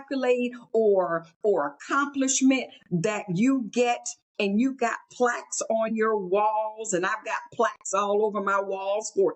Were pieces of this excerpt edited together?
no; 0 cuts

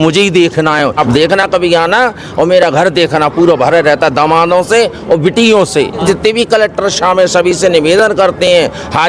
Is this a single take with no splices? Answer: no; 2 cuts; at 1.0 s, 6.0 s

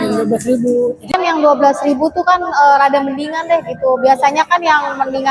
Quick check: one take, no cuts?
no; 1 cut; at 1.2 s

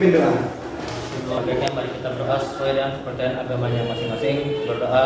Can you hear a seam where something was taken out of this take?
yes; 1 cut; at 1.4 s

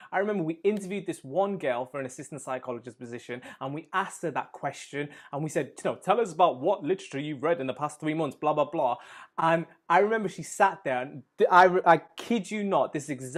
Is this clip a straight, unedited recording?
yes; 0 cuts

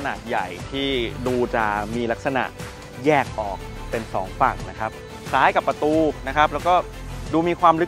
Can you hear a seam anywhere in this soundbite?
yes; 1 cut; at 5.1 s

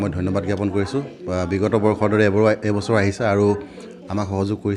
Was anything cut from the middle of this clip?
no; 0 cuts

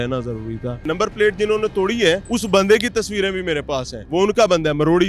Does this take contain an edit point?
yes; 3 cuts; at 0.9 s, 2.3 s, 4.0 s

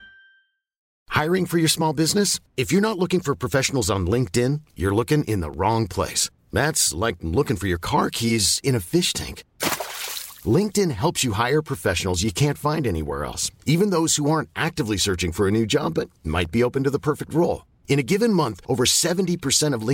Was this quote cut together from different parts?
yes; 1 cut; at 1.0 s

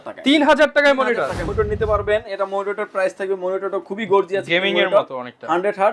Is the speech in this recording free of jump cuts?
no; 1 cut; at 1.4 s

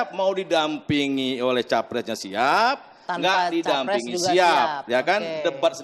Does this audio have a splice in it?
no; 0 cuts

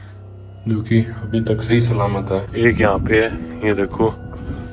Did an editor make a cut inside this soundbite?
yes; 1 cut; at 2.5 s

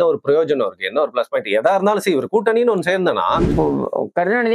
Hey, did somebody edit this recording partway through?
yes; 1 cut; at 3.5 s

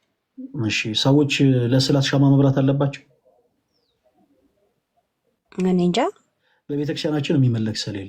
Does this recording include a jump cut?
yes; 1 cut; at 6.0 s

